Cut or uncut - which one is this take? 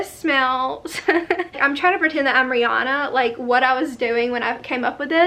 cut